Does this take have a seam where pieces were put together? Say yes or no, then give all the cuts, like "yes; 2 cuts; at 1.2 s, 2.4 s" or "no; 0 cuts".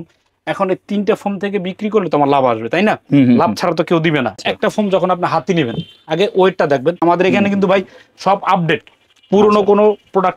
yes; 2 cuts; at 4.4 s, 7.0 s